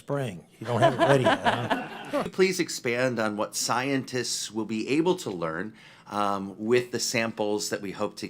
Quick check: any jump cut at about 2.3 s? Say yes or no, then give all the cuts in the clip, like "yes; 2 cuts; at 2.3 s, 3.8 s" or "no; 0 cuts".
yes; 1 cut; at 2.3 s